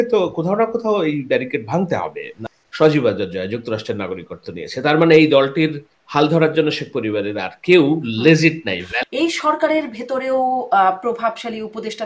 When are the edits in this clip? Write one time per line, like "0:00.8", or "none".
0:02.3
0:08.9